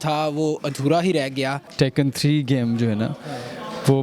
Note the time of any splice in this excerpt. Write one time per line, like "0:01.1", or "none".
0:01.6